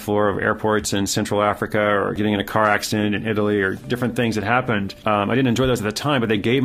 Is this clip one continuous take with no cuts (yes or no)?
no